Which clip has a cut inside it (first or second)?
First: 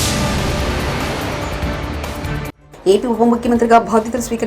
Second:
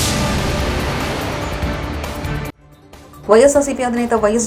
first